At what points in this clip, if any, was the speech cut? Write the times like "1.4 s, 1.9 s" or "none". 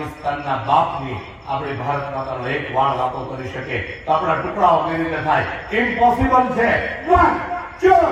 none

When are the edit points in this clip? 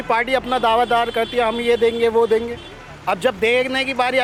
none

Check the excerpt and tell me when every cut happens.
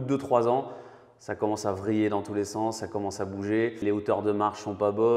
3.8 s

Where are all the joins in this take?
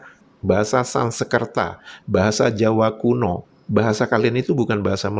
3.2 s

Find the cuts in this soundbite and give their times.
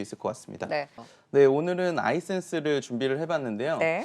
1.0 s

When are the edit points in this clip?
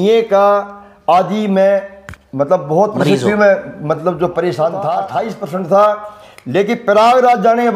5.2 s

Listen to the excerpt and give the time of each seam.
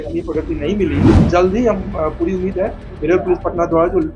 1.2 s

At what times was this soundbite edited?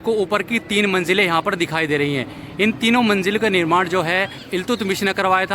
4.4 s

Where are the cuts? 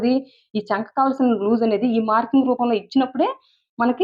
none

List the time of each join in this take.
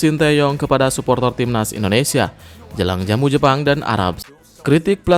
4.2 s

